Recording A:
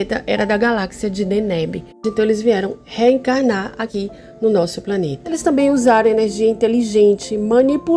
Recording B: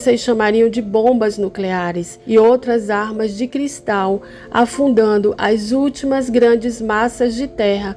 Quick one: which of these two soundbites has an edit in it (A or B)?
A